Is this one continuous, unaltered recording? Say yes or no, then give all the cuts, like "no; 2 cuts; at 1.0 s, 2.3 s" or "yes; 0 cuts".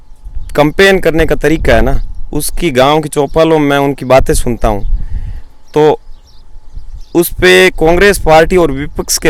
yes; 0 cuts